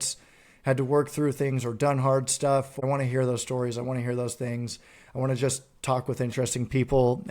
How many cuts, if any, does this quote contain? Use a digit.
1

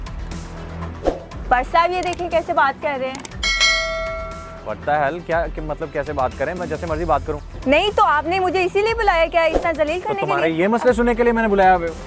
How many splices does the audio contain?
1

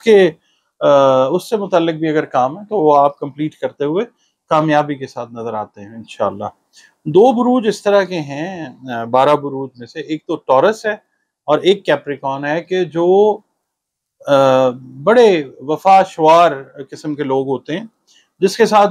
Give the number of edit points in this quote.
0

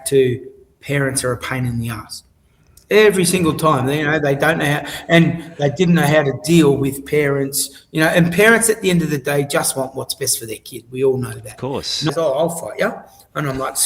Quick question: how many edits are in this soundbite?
1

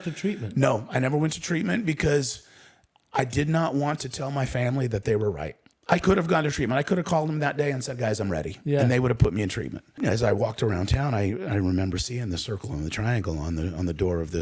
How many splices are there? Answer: 1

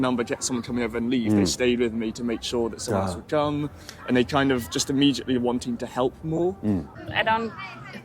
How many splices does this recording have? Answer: 1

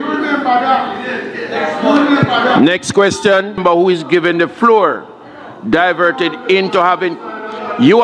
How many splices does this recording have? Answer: 1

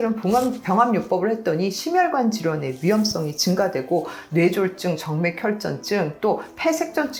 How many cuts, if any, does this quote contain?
0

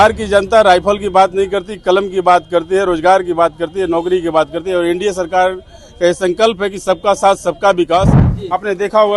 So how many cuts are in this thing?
1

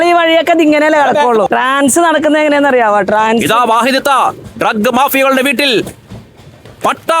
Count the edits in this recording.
1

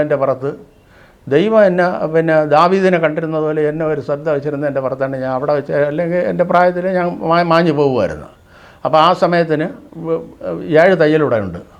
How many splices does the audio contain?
0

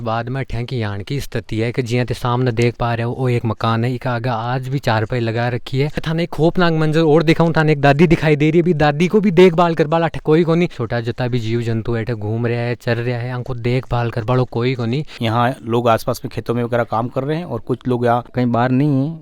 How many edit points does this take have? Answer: 4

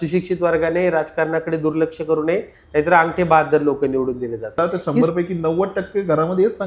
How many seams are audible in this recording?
1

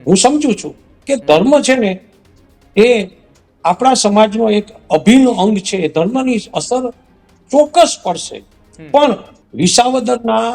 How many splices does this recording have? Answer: 1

